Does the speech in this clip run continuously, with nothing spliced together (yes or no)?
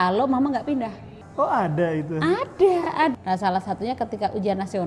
no